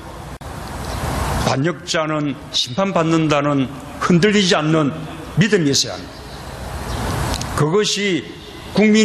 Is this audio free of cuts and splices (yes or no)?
yes